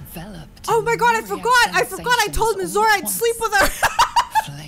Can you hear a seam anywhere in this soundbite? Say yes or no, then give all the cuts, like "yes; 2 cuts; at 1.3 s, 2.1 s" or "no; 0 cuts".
no; 0 cuts